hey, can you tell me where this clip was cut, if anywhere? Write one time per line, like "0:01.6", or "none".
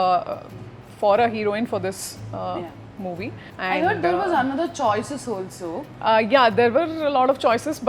0:03.5
0:05.9

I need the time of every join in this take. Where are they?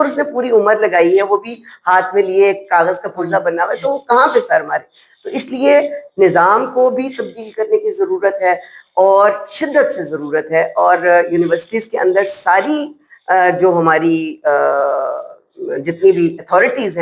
none

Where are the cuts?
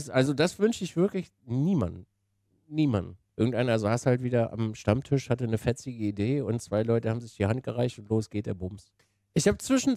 0:03.2
0:09.0

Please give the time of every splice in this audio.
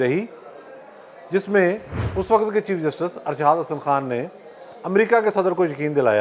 0:02.0

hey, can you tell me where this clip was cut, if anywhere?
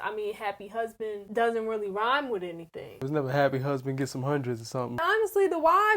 0:01.2
0:03.0
0:05.0

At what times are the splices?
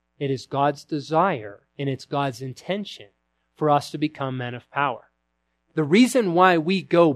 0:05.6

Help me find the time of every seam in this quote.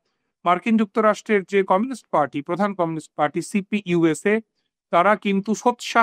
none

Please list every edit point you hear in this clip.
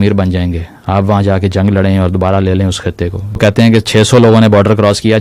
0:03.4

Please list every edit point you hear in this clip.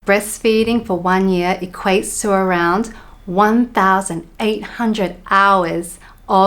none

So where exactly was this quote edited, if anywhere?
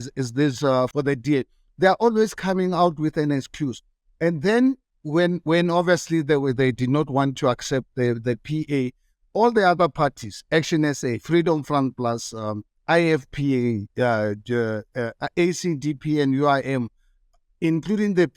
0:00.9

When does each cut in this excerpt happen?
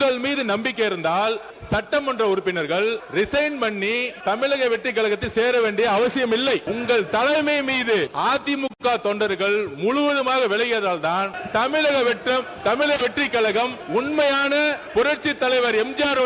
0:01.5
0:03.0
0:04.1
0:06.6
0:08.1
0:11.4
0:13.8
0:14.8

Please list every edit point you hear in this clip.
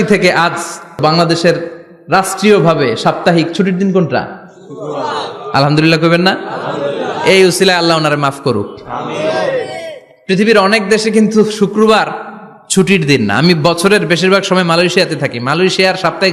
0:01.0

